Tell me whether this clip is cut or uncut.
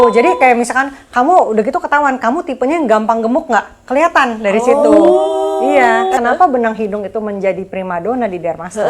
cut